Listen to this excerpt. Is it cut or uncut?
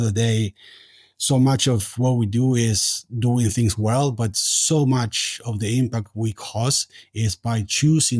uncut